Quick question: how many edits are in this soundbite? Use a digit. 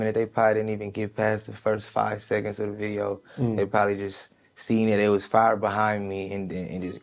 0